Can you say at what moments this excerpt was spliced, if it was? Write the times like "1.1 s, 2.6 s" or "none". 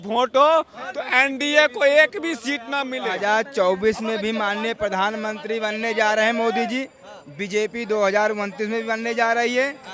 3.1 s